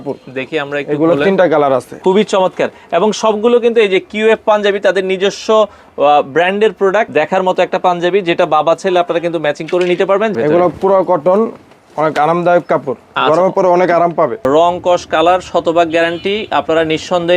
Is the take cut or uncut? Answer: cut